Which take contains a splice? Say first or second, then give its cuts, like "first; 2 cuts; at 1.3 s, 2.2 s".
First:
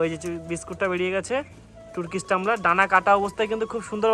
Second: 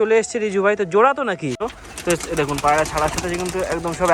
second; 1 cut; at 1.6 s